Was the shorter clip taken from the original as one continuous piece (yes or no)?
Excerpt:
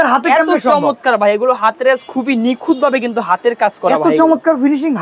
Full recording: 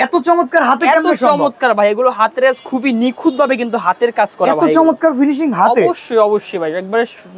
yes